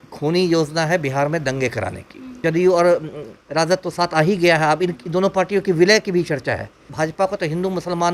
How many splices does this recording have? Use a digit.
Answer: 2